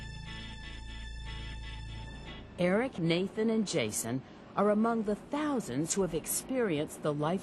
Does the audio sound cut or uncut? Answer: uncut